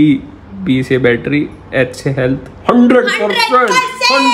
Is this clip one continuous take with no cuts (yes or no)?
yes